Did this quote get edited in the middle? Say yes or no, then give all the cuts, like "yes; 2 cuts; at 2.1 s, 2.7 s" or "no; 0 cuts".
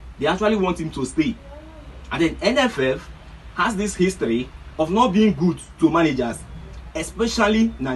no; 0 cuts